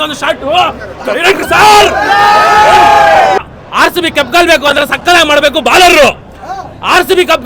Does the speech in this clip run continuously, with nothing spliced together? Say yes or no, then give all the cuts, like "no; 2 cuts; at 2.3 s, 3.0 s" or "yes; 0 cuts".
no; 1 cut; at 3.4 s